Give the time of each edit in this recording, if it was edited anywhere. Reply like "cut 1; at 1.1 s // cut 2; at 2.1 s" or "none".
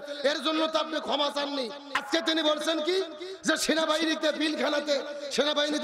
cut 1; at 2.0 s